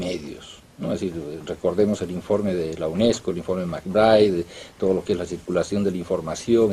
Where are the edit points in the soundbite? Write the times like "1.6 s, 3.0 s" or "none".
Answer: 1.1 s